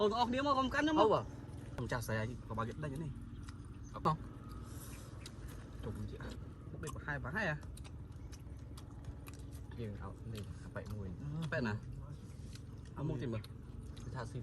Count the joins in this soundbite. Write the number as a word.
three